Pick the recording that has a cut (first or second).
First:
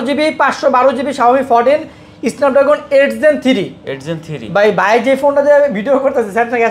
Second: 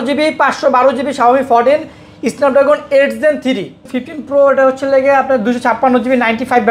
second